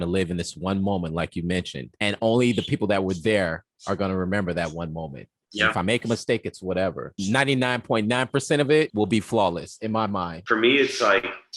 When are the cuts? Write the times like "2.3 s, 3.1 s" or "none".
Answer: none